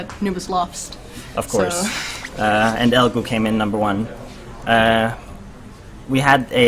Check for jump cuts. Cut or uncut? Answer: cut